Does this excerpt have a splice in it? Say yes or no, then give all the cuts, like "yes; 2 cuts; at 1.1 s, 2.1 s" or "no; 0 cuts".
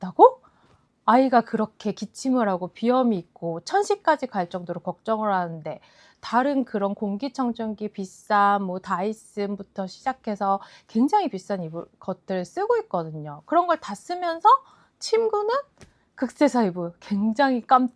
no; 0 cuts